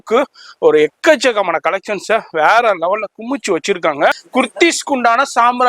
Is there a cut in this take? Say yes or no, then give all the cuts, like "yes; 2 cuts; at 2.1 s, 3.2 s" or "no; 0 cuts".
yes; 1 cut; at 4.2 s